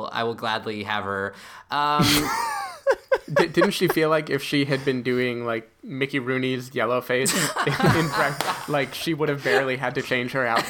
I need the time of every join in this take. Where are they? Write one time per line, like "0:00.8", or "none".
0:03.4